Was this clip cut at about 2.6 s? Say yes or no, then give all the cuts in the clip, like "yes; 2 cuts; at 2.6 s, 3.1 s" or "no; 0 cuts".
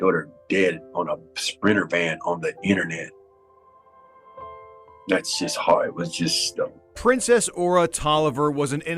no; 1 cut; at 6.8 s